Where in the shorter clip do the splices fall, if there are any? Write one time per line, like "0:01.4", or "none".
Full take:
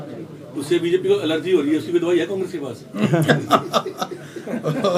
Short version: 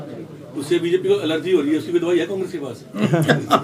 none